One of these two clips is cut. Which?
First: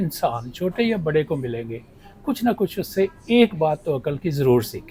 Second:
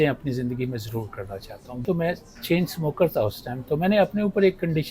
second; 1 cut; at 1.8 s

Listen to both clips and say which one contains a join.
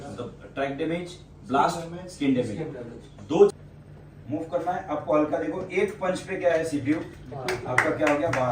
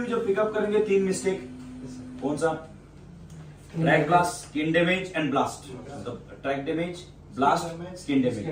first; 1 cut; at 3.6 s

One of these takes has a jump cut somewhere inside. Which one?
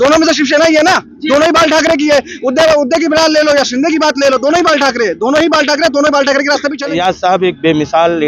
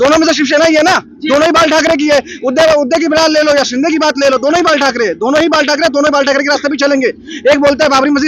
first; 1 cut; at 6.8 s

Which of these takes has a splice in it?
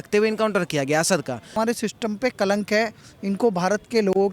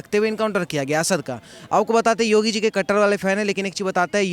first; 1 cut; at 1.5 s

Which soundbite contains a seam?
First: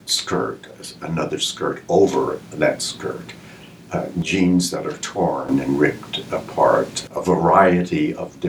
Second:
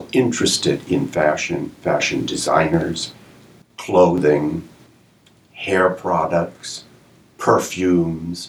first; 1 cut; at 7.1 s

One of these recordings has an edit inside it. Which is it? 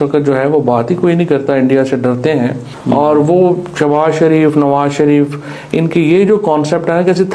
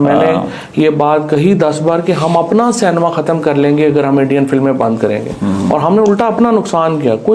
first; 1 cut; at 2.7 s

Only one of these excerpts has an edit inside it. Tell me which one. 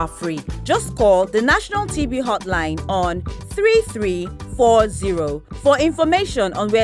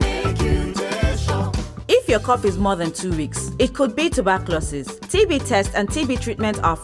second; 1 cut; at 1.7 s

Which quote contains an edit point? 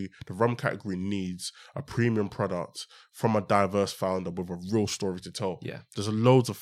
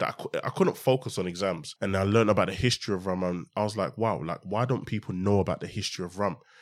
second; 1 cut; at 1.7 s

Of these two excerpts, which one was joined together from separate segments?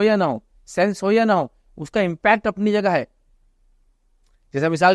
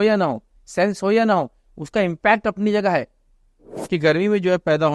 second; 1 cut; at 3.7 s

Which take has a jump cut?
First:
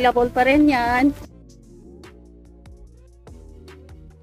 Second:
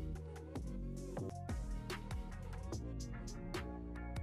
second; 1 cut; at 1.3 s

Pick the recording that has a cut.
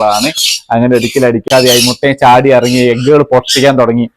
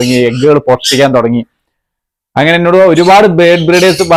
first; 1 cut; at 1.5 s

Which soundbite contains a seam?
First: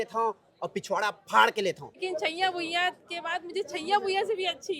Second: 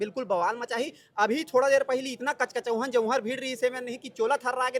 first; 1 cut; at 1.9 s

